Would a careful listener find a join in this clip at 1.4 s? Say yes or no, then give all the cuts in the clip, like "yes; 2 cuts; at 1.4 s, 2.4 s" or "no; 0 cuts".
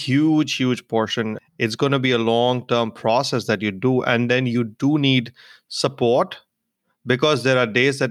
yes; 1 cut; at 1.4 s